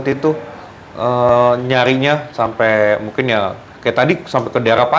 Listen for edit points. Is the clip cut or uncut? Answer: uncut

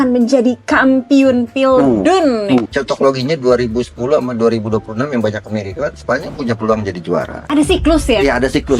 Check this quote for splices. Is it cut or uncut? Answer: cut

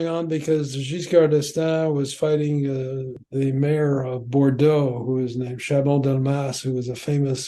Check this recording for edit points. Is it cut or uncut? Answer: cut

